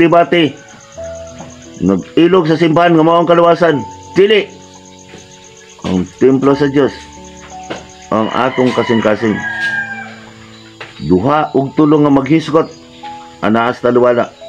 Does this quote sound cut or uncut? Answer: uncut